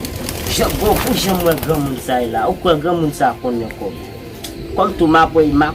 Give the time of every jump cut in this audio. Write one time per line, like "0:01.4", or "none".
none